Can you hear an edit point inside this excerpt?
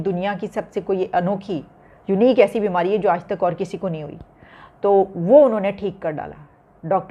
no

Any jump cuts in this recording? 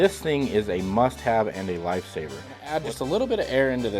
yes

